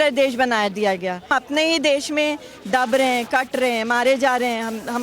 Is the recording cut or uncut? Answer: cut